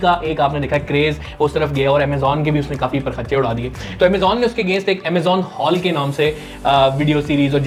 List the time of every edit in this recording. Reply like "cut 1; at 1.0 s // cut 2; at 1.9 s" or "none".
none